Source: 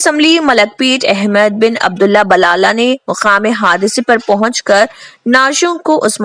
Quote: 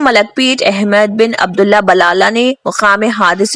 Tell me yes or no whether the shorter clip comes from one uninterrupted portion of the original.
yes